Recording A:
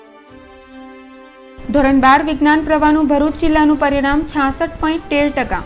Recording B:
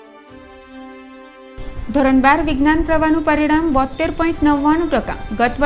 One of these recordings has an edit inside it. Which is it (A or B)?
B